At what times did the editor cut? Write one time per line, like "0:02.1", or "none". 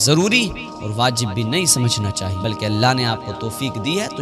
0:02.3